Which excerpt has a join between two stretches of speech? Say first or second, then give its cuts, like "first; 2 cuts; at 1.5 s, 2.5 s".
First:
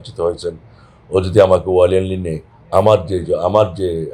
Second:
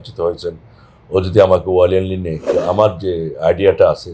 second; 1 cut; at 2.5 s